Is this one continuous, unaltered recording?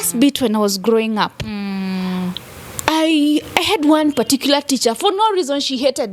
yes; 0 cuts

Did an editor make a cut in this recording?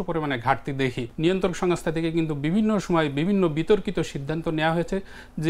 yes; 1 cut; at 1.1 s

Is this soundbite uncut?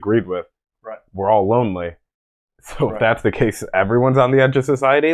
yes; 0 cuts

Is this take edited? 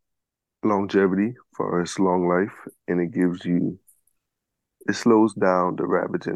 no; 0 cuts

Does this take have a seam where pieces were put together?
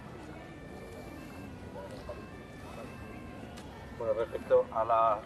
no; 0 cuts

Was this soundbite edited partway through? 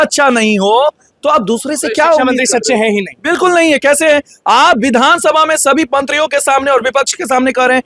no; 0 cuts

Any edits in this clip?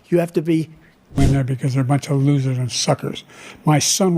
yes; 1 cut; at 1.2 s

